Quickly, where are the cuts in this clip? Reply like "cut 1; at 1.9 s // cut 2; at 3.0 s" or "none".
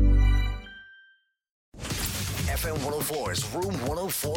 cut 1; at 1.7 s

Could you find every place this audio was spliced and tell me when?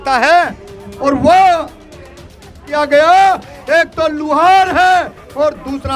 cut 1; at 2.6 s

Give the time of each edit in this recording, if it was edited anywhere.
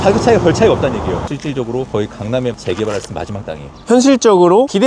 cut 1; at 1.2 s // cut 2; at 3.8 s

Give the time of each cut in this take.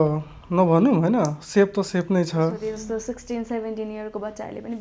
cut 1; at 2.7 s

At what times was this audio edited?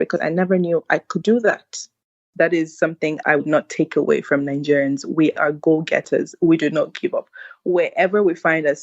cut 1; at 2.3 s // cut 2; at 3.2 s

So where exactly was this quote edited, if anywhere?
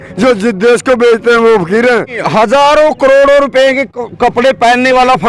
cut 1; at 2.2 s

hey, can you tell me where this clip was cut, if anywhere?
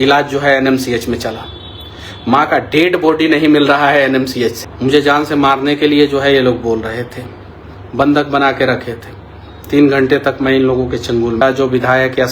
cut 1; at 4.7 s // cut 2; at 11.4 s

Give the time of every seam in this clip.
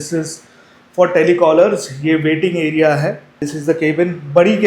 cut 1; at 3.5 s

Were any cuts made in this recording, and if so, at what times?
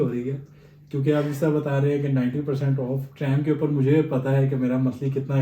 none

